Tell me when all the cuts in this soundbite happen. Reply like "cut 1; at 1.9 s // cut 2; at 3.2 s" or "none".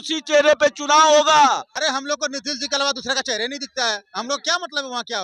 cut 1; at 1.7 s

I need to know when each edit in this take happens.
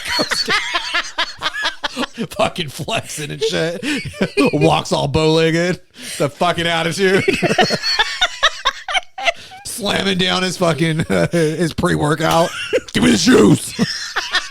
cut 1; at 2.1 s // cut 2; at 9.7 s // cut 3; at 12.9 s

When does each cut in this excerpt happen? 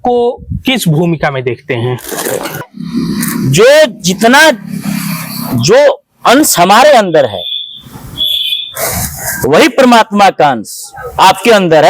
cut 1; at 2.7 s

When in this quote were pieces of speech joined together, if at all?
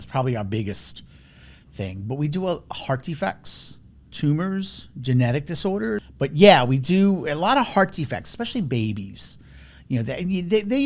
cut 1; at 6.1 s

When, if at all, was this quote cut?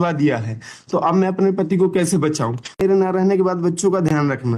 cut 1; at 2.8 s

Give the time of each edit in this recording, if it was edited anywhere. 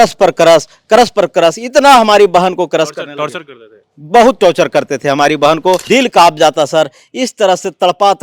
cut 1; at 5.8 s

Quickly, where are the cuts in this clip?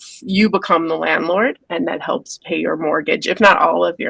cut 1; at 1.6 s

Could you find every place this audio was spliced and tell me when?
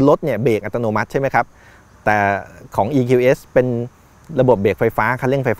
none

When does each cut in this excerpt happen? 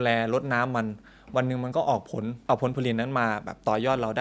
cut 1; at 2.3 s

